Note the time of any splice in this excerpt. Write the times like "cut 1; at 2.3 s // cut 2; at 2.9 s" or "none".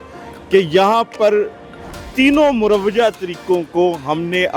none